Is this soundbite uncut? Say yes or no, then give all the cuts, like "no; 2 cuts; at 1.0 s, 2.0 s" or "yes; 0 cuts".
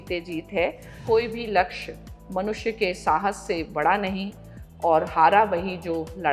no; 1 cut; at 1.0 s